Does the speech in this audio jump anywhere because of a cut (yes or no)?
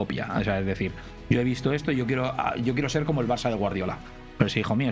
no